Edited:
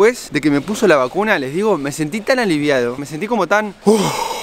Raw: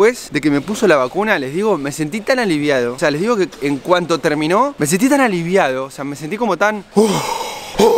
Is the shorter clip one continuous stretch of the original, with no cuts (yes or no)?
no